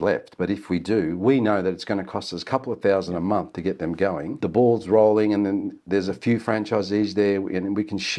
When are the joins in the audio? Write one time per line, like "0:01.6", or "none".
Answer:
0:04.4